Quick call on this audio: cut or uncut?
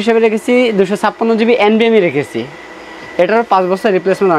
uncut